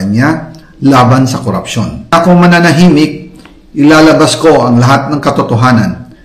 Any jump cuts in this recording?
yes; 1 cut; at 2.1 s

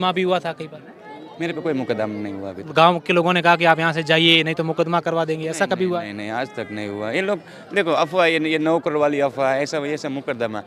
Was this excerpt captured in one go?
yes; 0 cuts

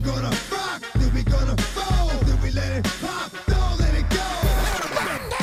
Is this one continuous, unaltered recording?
yes; 0 cuts

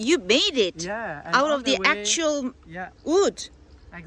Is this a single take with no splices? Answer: yes; 0 cuts

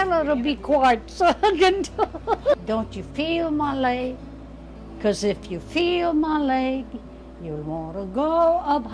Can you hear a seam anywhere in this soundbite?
yes; 1 cut; at 2.5 s

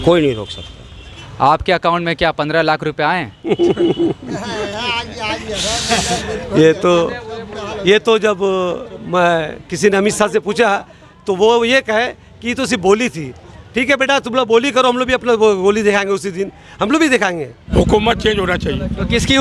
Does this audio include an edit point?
yes; 2 cuts; at 1.2 s, 17.7 s

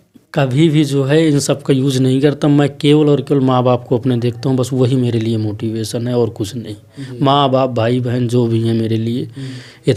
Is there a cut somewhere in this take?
no; 0 cuts

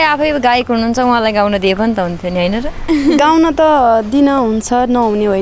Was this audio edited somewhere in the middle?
no; 0 cuts

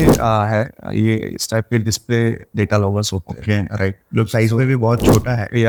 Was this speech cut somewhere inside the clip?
no; 0 cuts

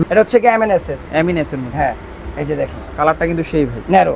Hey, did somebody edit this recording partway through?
no; 0 cuts

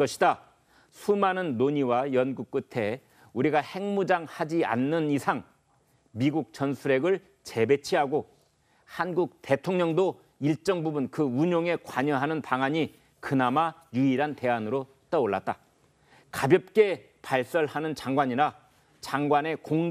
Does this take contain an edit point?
yes; 1 cut; at 9.9 s

